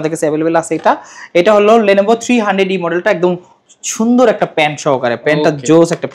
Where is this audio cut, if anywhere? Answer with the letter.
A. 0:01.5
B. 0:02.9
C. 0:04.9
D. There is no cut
D